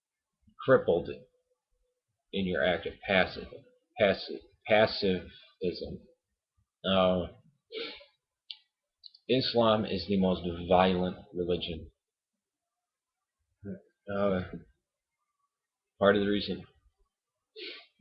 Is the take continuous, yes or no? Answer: no